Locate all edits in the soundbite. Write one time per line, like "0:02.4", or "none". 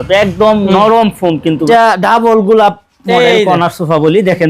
0:01.7